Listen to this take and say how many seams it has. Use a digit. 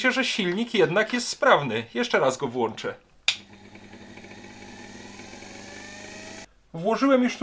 1